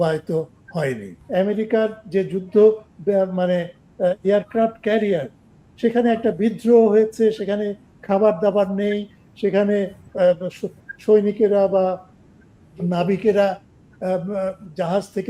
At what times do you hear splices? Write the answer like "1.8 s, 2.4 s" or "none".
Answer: 1.2 s